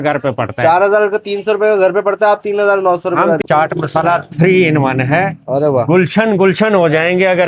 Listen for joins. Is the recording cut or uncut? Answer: cut